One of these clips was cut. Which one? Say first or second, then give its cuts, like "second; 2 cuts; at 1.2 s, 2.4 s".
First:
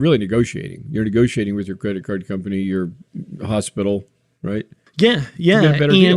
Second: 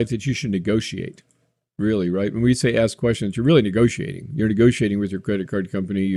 first; 1 cut; at 4.8 s